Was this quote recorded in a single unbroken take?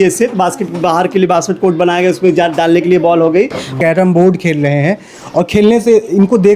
no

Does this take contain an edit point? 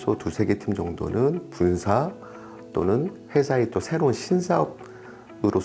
no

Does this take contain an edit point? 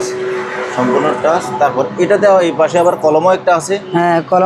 no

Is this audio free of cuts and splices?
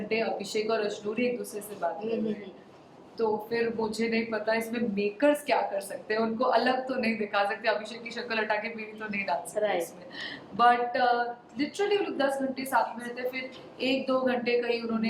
yes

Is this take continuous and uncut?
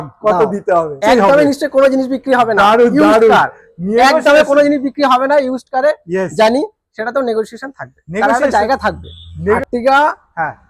no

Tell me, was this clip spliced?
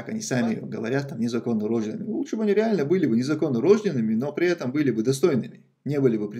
no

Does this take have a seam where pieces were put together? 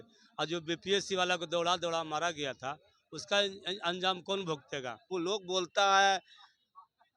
yes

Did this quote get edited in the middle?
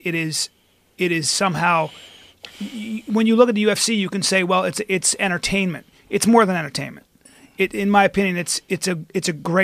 yes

